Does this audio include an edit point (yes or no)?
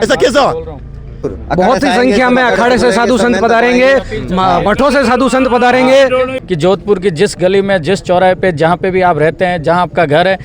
yes